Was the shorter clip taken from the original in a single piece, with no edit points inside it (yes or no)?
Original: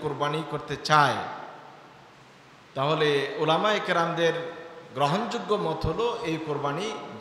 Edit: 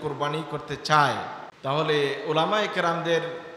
no